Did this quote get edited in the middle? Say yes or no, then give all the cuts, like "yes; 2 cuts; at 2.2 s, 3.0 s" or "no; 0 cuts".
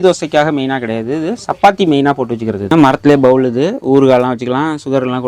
yes; 1 cut; at 2.6 s